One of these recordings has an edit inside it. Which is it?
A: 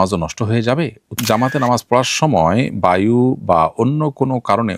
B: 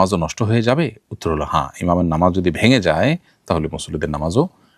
A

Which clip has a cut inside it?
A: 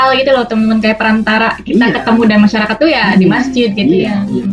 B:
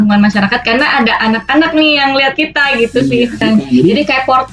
B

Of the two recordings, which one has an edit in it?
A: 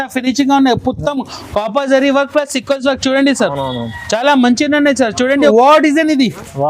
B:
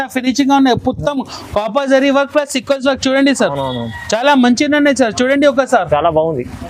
A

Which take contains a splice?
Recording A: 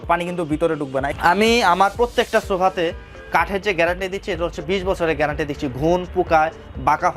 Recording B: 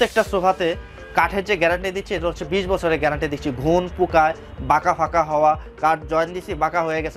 A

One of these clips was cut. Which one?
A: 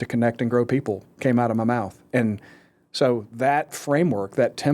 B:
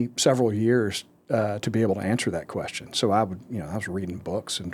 A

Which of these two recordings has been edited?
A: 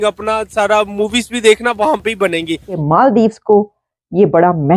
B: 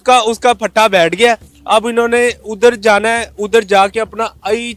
A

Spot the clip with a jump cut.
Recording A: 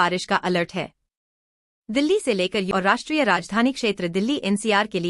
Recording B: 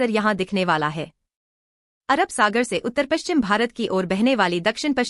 A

